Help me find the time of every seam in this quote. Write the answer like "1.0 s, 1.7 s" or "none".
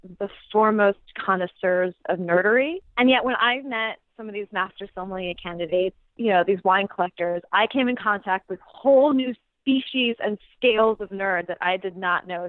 2.8 s